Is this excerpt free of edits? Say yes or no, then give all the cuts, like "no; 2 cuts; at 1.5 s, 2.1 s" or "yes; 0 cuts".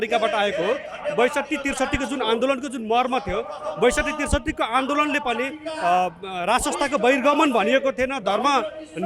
yes; 0 cuts